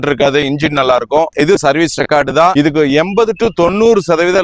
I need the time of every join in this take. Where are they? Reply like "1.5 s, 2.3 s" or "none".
1.3 s, 2.5 s